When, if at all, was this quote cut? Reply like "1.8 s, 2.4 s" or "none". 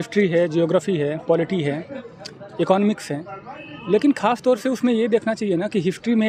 none